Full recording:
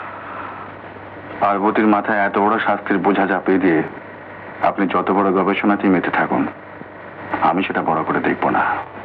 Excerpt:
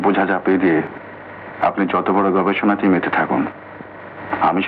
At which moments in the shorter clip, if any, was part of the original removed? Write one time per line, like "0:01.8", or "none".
none